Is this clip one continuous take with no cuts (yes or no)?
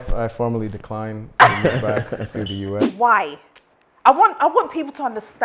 no